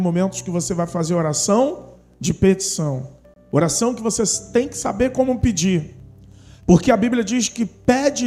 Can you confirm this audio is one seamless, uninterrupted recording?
yes; 0 cuts

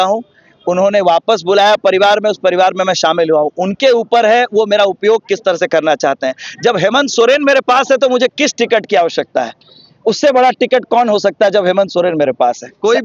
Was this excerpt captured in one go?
yes; 0 cuts

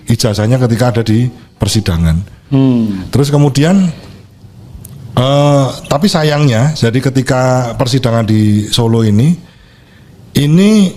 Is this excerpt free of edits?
yes; 0 cuts

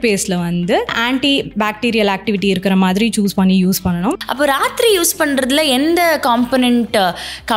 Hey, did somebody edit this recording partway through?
yes; 2 cuts; at 1.0 s, 4.2 s

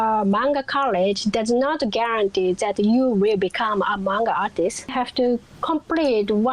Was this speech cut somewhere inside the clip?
yes; 1 cut; at 4.9 s

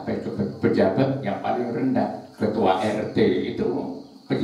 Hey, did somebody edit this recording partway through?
no; 0 cuts

